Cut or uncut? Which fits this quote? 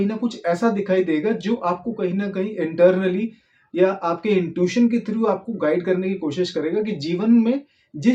uncut